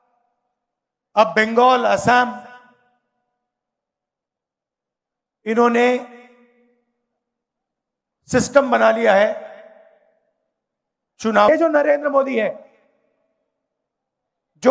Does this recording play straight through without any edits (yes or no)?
no